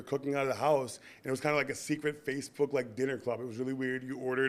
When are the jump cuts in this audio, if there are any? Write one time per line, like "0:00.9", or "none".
none